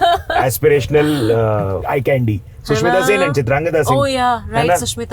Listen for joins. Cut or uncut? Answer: cut